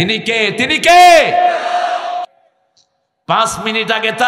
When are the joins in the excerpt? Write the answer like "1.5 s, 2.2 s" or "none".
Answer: 2.3 s